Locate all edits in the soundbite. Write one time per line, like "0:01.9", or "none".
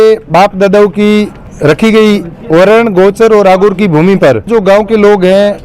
0:01.4
0:04.5